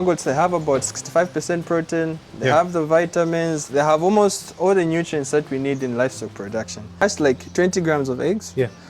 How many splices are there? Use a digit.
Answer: 1